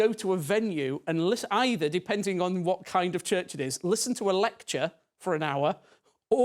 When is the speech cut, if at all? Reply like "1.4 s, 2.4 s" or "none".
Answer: none